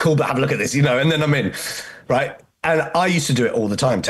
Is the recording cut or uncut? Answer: uncut